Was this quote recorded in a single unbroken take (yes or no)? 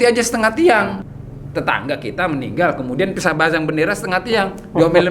no